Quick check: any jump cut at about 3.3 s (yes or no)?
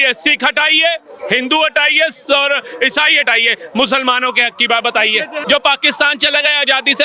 no